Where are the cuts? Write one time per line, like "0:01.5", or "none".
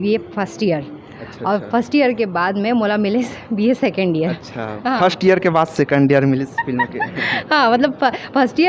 none